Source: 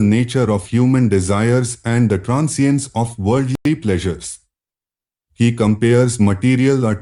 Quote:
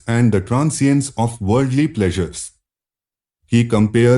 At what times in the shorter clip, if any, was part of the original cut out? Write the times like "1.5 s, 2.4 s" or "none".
1.7 s

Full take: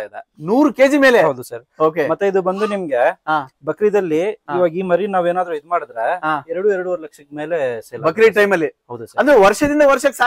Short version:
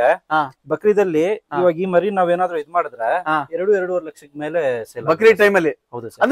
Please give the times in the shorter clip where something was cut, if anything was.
none

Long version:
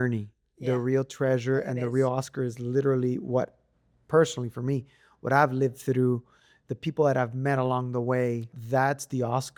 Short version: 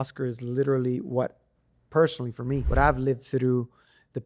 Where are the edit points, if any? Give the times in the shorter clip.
2.6 s

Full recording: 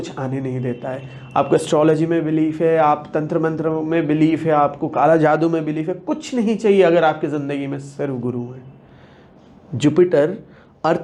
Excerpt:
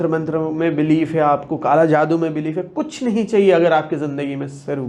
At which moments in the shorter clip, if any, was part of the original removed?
none

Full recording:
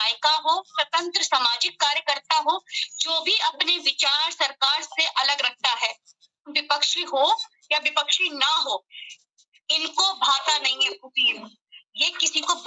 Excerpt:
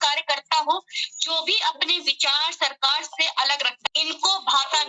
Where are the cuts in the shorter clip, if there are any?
3.8 s

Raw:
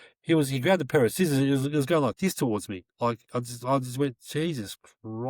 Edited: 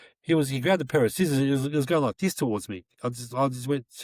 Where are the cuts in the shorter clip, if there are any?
2.9 s

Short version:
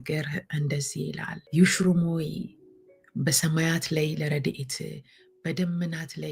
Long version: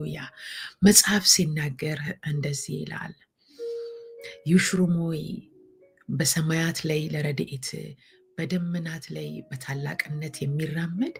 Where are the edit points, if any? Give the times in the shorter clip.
1.4 s

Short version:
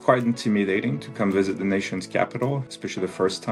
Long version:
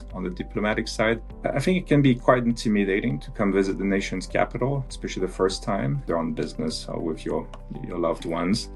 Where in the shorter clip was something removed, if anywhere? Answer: none

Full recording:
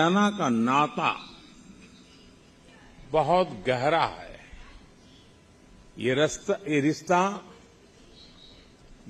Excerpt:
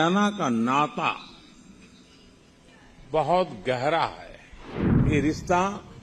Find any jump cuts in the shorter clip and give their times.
5.0 s

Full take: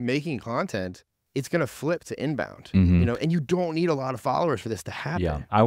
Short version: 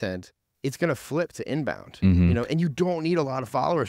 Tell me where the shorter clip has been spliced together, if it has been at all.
none

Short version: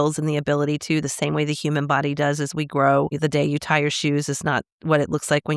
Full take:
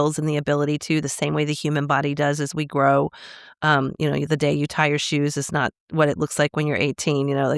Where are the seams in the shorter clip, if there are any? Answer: 3.1 s

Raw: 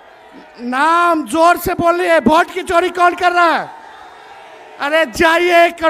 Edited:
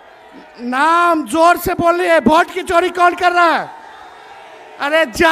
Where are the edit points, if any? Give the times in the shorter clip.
none

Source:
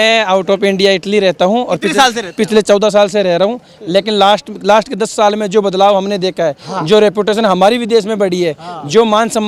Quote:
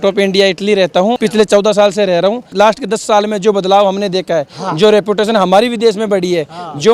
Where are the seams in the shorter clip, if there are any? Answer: 1.2 s, 2.4 s

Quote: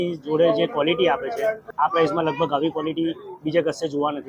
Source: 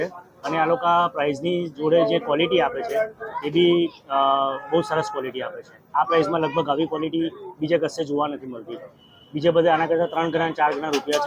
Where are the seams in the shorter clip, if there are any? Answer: 1.7 s

